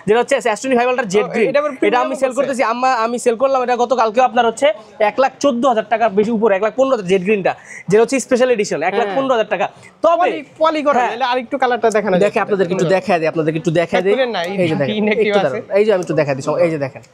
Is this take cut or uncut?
uncut